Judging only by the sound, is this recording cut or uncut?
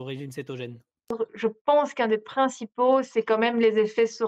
cut